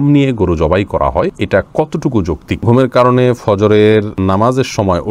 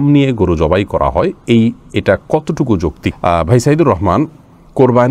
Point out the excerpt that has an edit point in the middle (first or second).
first